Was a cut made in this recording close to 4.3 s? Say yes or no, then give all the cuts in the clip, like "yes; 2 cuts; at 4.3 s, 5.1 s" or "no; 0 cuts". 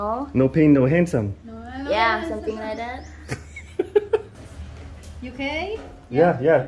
yes; 1 cut; at 4.3 s